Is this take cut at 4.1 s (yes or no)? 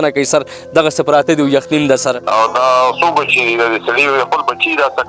no